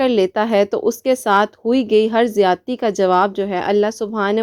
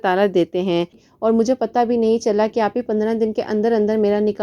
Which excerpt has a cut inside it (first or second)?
second